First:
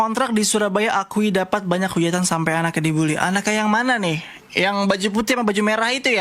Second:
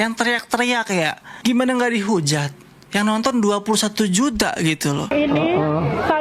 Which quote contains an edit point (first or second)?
second